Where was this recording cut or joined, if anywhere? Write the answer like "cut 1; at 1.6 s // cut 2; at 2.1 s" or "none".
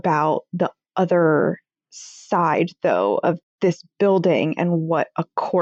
none